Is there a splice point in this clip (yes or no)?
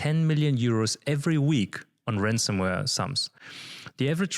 no